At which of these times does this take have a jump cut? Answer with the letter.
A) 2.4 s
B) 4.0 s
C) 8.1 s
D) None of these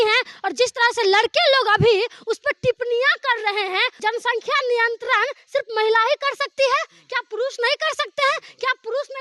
B